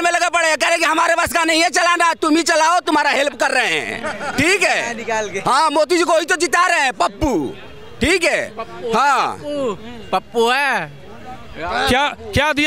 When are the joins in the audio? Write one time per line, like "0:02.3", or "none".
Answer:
none

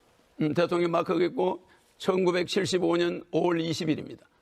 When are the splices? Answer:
none

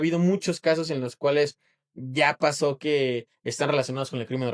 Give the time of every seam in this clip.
none

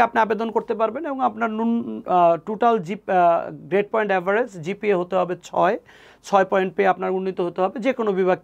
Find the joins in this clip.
none

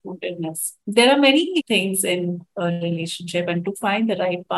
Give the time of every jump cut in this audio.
0:01.6

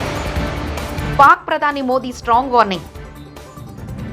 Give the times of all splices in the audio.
0:01.1

